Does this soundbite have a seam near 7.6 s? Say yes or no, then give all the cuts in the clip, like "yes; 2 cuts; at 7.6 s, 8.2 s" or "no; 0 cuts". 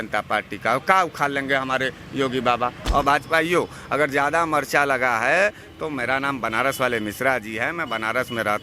no; 1 cut; at 2.8 s